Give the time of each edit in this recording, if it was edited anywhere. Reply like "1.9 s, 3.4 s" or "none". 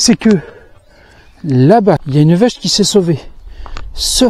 2.0 s

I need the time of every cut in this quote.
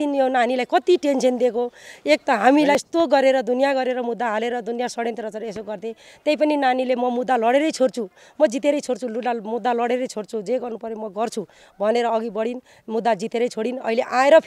2.7 s

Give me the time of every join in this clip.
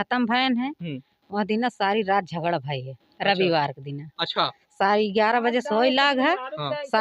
none

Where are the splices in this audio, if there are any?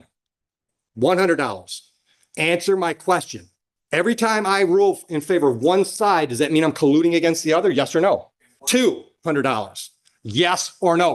none

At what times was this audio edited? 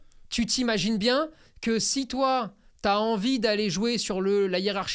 none

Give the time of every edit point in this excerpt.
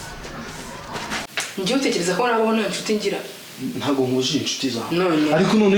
1.2 s

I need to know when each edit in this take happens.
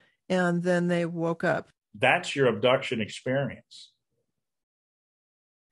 1.7 s

